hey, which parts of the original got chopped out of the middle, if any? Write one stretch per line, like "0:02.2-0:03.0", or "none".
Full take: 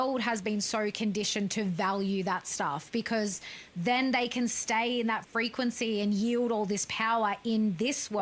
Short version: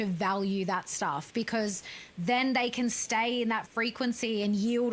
none